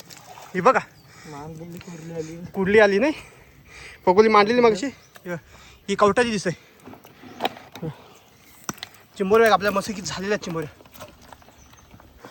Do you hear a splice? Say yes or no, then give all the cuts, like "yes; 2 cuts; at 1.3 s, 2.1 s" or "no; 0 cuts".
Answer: no; 0 cuts